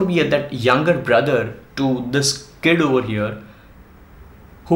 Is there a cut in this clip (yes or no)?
no